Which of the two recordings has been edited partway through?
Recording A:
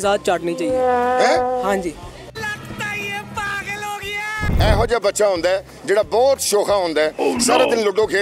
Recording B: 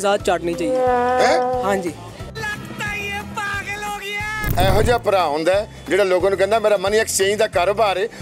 B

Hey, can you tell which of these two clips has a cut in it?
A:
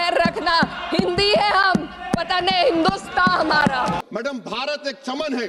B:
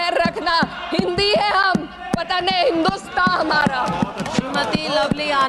A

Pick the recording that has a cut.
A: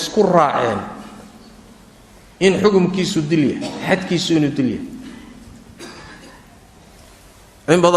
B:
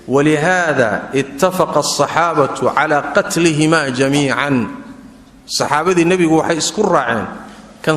A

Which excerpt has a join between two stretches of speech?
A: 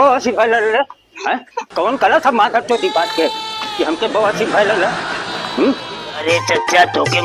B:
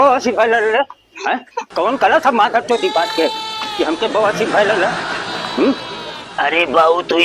A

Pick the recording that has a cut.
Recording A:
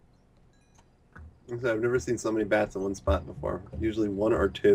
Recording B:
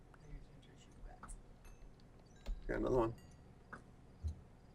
B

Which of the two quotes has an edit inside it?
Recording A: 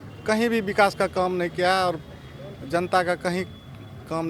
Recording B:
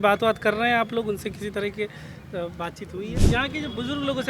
B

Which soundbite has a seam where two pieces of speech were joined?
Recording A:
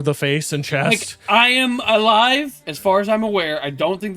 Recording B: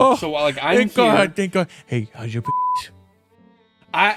A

